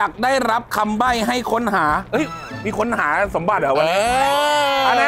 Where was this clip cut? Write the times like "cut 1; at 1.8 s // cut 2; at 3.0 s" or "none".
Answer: none